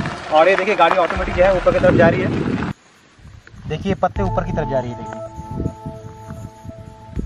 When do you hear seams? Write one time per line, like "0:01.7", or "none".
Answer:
0:02.7